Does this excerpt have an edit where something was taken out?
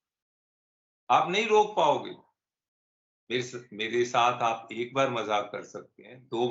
no; 0 cuts

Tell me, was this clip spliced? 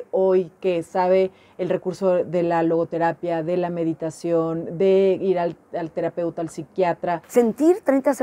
yes; 1 cut; at 7.2 s

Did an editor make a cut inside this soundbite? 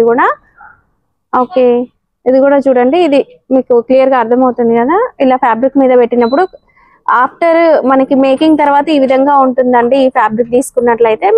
no; 0 cuts

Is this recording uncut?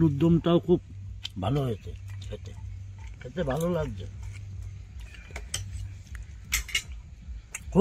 yes; 0 cuts

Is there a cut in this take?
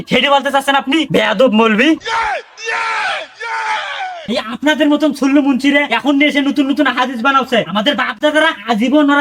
no; 0 cuts

